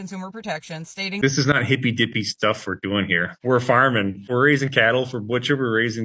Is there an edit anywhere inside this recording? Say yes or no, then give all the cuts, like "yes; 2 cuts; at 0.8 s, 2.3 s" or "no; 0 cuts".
yes; 1 cut; at 1.2 s